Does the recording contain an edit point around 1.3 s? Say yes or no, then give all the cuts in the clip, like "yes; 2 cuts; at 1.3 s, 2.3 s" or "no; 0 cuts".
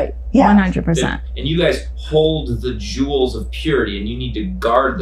yes; 1 cut; at 1.3 s